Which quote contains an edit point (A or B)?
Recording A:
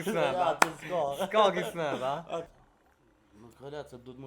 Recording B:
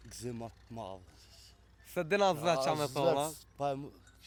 A